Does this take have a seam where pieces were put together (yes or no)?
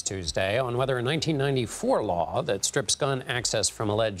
no